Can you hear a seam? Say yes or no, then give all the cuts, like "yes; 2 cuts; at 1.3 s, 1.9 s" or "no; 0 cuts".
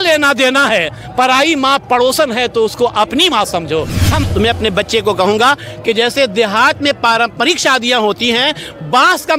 yes; 1 cut; at 4.2 s